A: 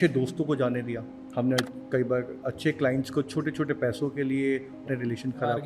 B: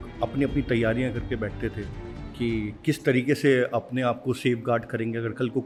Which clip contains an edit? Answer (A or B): A